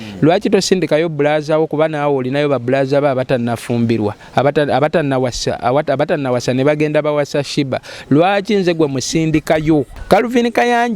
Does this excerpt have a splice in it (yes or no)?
yes